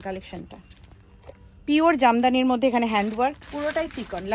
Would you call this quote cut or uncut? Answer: cut